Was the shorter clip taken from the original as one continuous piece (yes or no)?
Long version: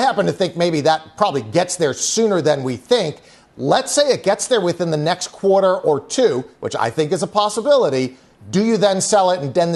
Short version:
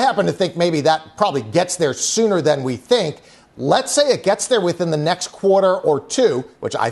yes